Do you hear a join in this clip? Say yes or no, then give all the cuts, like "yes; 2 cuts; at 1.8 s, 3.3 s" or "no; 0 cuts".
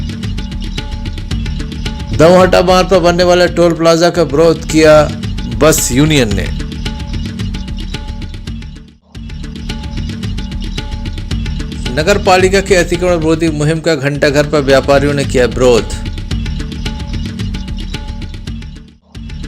yes; 1 cut; at 1.9 s